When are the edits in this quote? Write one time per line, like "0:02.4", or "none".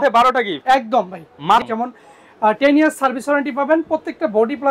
0:01.6

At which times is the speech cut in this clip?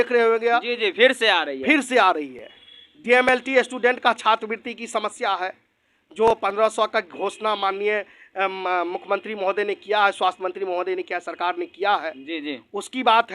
0:02.6

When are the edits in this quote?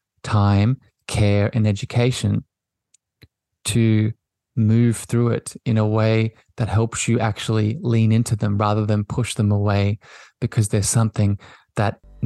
none

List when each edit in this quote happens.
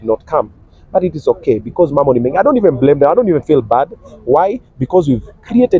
none

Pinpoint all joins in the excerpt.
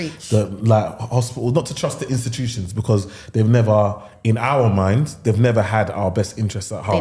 none

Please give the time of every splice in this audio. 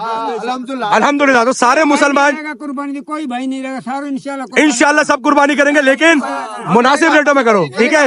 none

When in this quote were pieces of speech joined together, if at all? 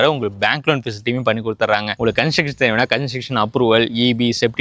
0:02.0

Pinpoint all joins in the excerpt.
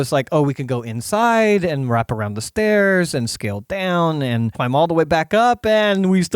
0:04.5

